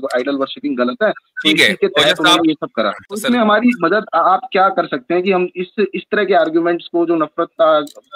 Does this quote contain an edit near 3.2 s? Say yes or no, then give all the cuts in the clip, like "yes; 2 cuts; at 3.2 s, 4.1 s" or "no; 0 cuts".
yes; 1 cut; at 3.2 s